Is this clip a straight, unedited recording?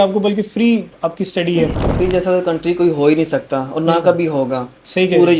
no; 1 cut; at 1.9 s

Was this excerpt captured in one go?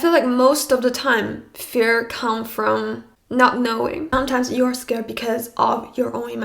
no; 1 cut; at 4.1 s

